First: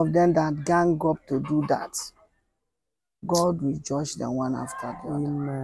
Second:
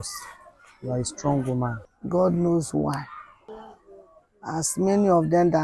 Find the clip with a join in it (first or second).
second